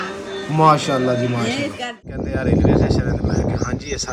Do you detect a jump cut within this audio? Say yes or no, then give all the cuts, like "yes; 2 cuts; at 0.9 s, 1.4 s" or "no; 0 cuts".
yes; 1 cut; at 2.2 s